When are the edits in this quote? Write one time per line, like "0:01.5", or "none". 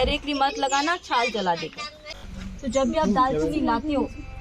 0:02.2